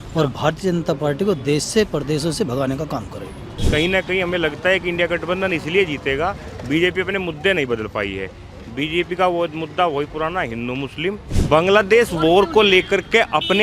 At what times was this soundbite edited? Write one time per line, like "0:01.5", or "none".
0:03.5
0:11.3